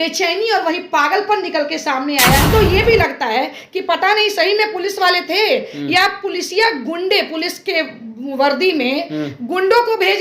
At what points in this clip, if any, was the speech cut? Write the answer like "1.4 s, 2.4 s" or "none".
2.5 s